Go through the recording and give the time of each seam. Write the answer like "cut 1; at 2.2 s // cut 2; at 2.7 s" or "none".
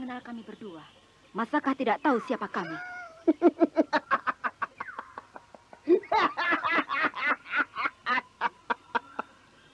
none